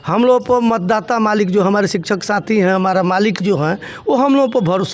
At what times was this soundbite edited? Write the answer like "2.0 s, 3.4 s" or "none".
none

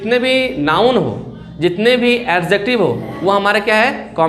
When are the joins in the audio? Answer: none

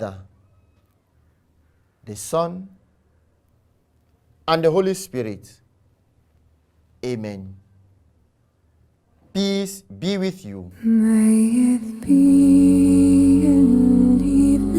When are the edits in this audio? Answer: 10.9 s

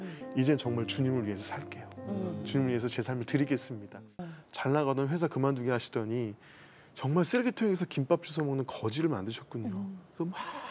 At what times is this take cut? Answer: 4.2 s

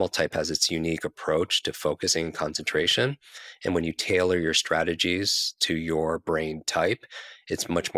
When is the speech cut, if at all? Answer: none

